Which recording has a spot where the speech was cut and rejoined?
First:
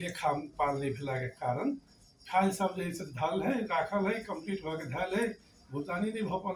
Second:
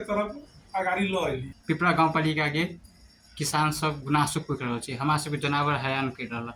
second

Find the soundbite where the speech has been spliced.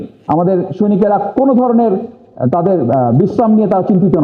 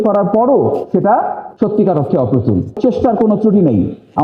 second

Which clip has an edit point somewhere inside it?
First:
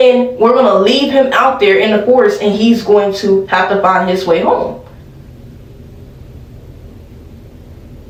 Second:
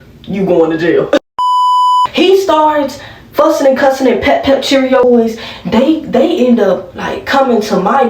second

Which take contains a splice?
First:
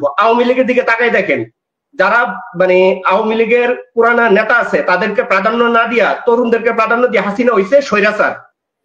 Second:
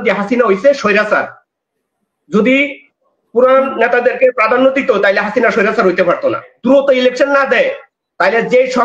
second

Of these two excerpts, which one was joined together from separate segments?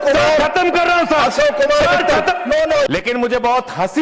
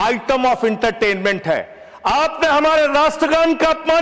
first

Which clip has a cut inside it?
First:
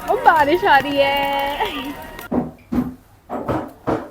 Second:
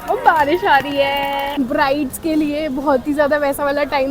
second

